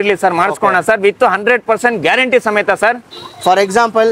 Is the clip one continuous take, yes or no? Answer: yes